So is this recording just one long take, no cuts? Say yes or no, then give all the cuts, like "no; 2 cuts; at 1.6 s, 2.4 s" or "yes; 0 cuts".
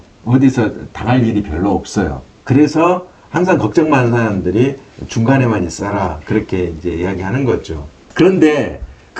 yes; 0 cuts